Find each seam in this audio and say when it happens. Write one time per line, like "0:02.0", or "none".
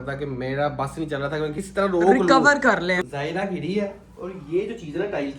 0:01.6
0:03.0